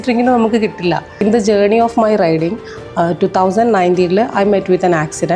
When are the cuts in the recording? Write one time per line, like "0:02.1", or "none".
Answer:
0:01.1